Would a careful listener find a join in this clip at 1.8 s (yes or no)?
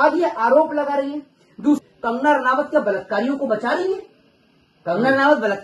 yes